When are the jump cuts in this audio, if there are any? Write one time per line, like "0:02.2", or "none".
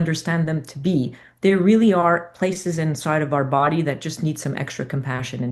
none